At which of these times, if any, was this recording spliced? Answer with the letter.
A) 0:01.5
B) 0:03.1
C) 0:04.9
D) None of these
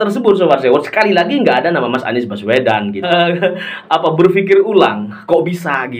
B